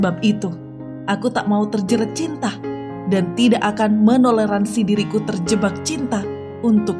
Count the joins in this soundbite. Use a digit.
0